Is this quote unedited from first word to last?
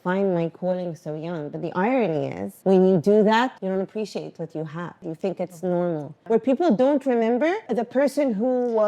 no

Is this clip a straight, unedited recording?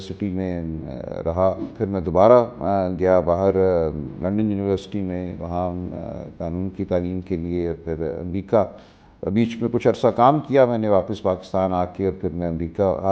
no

